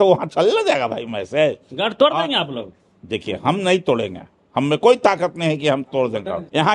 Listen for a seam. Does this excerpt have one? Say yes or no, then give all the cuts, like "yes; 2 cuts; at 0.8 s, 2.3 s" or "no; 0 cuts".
no; 0 cuts